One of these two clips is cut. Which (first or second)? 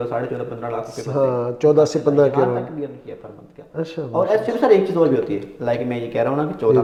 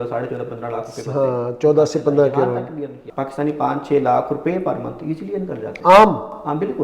second